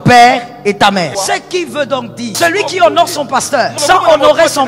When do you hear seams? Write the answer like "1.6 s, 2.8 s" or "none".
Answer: 1.1 s, 2.4 s, 3.7 s